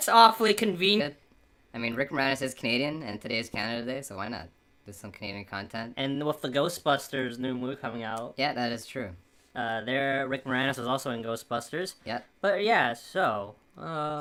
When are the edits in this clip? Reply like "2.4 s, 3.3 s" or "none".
none

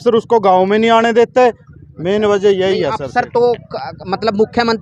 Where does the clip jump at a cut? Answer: none

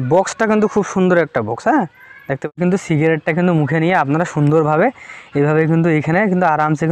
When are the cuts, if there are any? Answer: 2.6 s

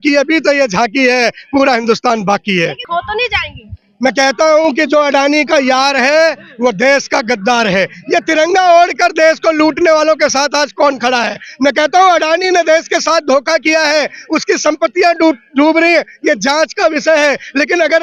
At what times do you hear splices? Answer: none

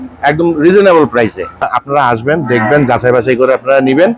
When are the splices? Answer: 1.8 s

